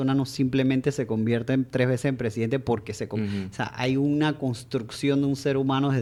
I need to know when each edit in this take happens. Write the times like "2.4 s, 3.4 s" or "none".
none